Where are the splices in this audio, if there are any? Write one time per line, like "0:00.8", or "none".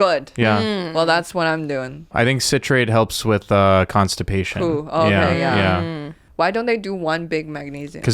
0:02.1
0:06.2